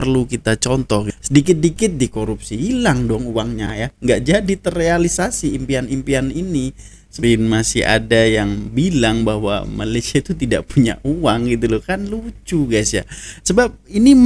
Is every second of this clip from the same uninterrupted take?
no; 2 cuts; at 1.1 s, 7.2 s

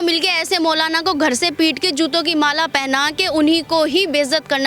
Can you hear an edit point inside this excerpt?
no; 0 cuts

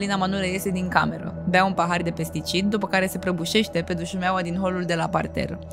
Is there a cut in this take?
no; 0 cuts

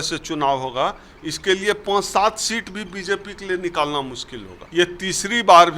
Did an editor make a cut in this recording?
yes; 1 cut; at 4.6 s

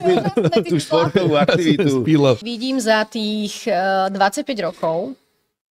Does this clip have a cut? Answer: yes; 1 cut; at 2.4 s

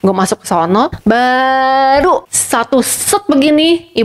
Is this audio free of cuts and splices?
no; 2 cuts; at 1.0 s, 2.4 s

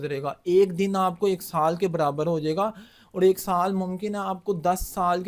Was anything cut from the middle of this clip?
no; 0 cuts

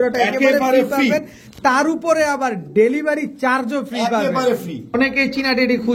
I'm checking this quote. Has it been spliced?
yes; 1 cut; at 4.9 s

